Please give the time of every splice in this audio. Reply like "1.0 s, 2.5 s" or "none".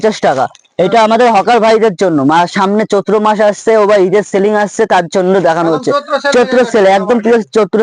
none